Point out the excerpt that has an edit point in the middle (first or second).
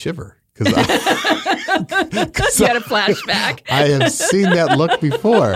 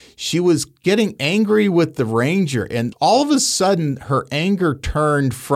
second